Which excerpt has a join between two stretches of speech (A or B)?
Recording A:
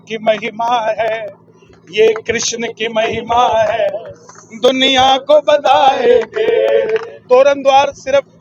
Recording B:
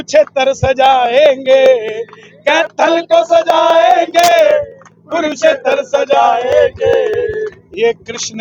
A